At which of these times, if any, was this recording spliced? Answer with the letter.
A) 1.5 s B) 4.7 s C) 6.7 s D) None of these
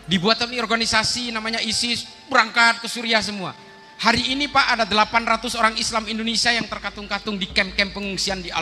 D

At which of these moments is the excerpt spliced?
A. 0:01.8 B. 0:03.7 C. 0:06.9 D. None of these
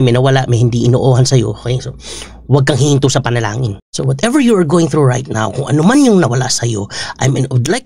B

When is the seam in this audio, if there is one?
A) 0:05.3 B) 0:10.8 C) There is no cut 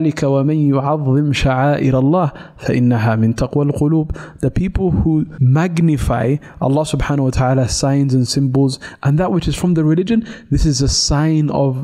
A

